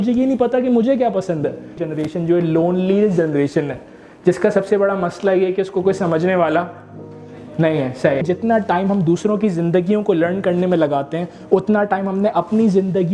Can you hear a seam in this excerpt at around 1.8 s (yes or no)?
yes